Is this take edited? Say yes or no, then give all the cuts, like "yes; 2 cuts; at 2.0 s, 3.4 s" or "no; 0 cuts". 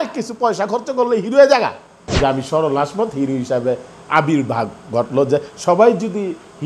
yes; 1 cut; at 2.0 s